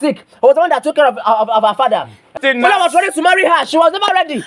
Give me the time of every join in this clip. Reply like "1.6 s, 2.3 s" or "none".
2.3 s